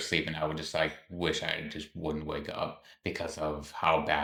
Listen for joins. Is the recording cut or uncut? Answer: uncut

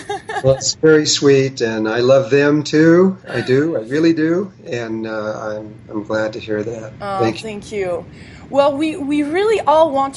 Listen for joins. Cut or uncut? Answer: cut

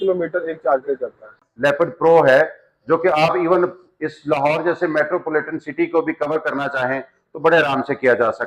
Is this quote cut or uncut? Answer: cut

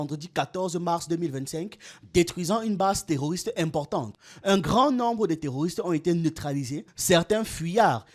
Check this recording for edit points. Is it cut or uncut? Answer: cut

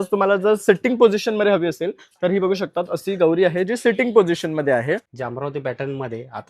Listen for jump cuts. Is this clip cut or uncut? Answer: cut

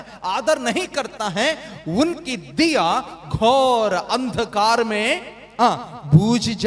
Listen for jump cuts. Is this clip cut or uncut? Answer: uncut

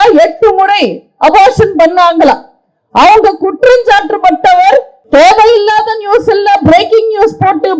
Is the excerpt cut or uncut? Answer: cut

